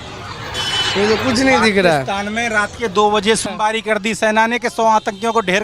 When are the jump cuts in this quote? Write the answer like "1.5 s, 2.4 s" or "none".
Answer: 3.5 s